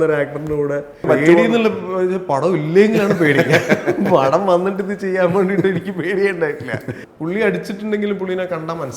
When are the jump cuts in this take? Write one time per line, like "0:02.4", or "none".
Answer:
0:01.0
0:07.0